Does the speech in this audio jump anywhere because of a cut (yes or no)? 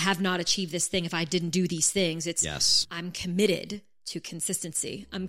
no